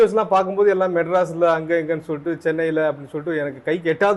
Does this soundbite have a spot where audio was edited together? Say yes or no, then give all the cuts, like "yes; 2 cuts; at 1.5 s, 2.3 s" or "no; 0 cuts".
no; 0 cuts